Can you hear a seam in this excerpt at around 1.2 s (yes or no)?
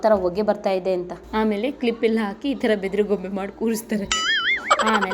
yes